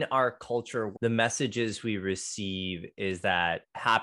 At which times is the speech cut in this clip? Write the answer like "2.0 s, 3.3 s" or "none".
0.9 s